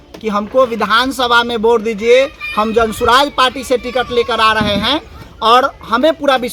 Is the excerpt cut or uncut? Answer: uncut